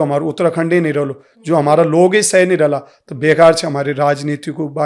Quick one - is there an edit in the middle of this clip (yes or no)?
no